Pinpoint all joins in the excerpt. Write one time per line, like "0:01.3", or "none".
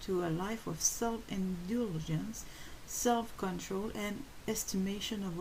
none